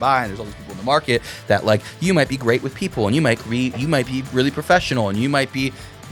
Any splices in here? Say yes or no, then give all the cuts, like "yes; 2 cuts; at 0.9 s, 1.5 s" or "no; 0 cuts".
no; 0 cuts